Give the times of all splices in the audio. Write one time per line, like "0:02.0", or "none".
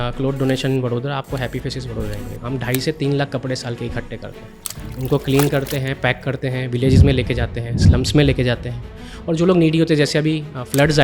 0:04.7